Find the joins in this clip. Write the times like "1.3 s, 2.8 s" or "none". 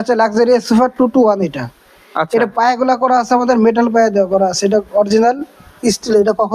none